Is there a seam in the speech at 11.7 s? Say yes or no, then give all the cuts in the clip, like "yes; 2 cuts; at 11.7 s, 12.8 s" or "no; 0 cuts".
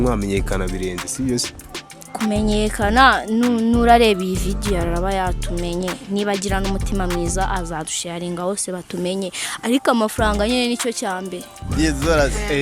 yes; 1 cut; at 11.7 s